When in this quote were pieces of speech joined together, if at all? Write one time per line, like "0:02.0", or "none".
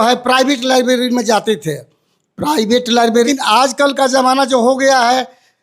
0:03.3

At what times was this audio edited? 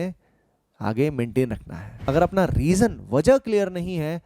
0:01.9

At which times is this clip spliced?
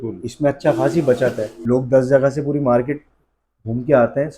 0:01.5

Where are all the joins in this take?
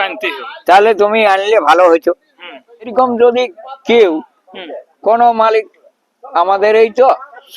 0:02.9

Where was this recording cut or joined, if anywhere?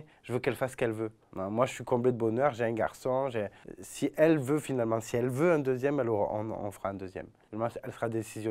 0:01.2

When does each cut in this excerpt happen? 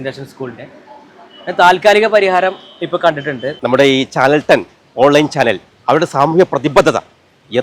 0:03.5

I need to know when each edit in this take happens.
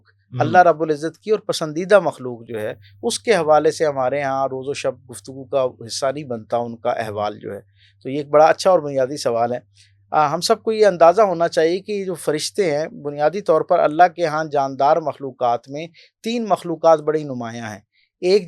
none

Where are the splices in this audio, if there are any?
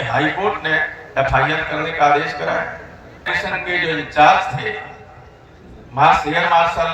0:03.3

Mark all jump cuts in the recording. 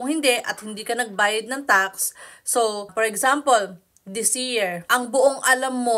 0:02.9
0:04.8

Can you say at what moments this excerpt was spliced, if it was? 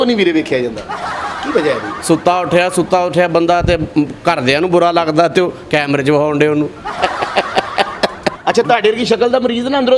0:01.9
0:08.3

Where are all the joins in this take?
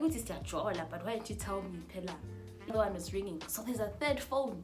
0:02.7

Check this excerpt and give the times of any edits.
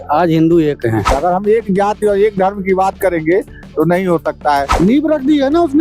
0:01.1
0:04.7

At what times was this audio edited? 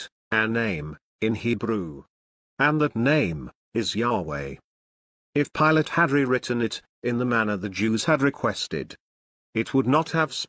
none

